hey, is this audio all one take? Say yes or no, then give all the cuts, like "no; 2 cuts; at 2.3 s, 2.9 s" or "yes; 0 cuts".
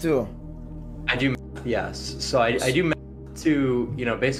yes; 0 cuts